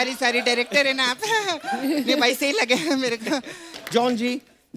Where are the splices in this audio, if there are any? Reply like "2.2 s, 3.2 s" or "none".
3.6 s